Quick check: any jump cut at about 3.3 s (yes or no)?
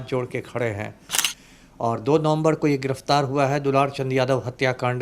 no